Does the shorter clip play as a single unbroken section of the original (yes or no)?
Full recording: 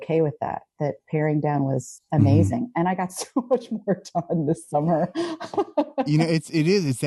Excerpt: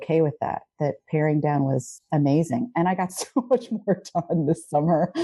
yes